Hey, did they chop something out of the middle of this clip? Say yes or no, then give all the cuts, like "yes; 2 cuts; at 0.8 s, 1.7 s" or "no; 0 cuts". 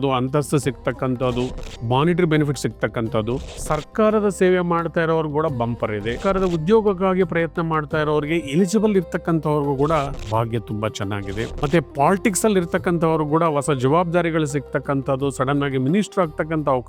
yes; 5 cuts; at 1.7 s, 3.5 s, 6.2 s, 10.2 s, 11.5 s